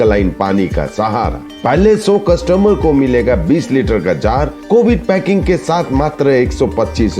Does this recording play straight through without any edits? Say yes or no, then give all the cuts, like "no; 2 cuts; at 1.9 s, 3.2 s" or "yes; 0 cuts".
yes; 0 cuts